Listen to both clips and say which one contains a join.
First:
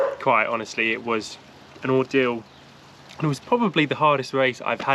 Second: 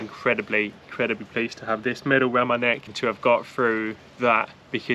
second; 1 cut; at 2.9 s

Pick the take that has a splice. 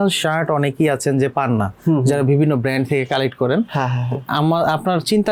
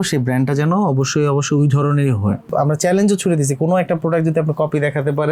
second; 1 cut; at 2.5 s

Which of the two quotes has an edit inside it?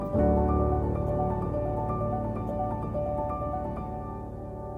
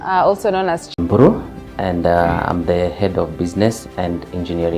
second; 1 cut; at 0.9 s

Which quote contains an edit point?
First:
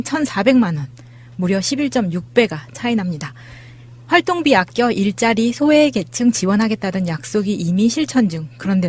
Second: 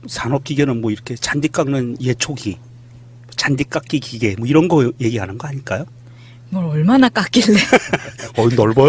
second; 1 cut; at 5.2 s

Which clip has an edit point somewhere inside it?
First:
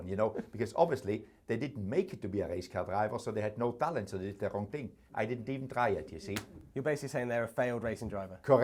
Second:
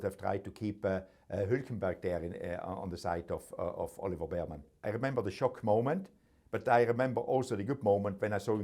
second; 1 cut; at 4.6 s

